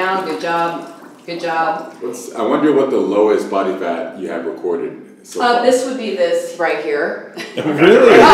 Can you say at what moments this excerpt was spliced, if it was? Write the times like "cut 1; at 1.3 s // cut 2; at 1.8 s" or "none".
cut 1; at 2.0 s